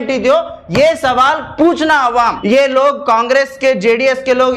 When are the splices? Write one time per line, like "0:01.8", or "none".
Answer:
0:02.3